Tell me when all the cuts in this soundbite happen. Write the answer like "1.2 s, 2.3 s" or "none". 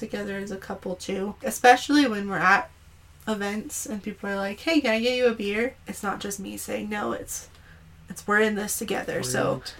1.4 s, 5.9 s